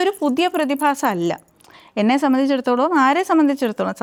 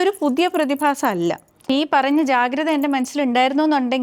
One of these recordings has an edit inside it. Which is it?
second; 1 cut; at 1.7 s

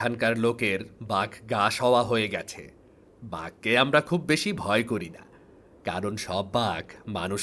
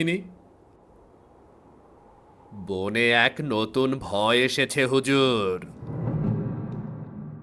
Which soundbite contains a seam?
second; 1 cut; at 5.8 s

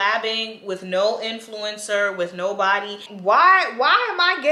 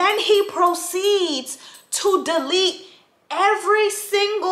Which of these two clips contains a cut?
first; 1 cut; at 3.1 s

